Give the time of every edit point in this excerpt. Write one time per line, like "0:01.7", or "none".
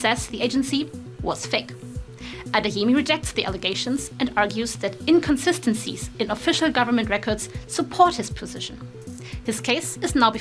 none